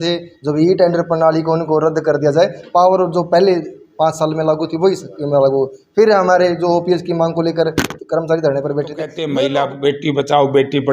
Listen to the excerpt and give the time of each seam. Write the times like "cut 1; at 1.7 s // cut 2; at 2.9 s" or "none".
cut 1; at 9.2 s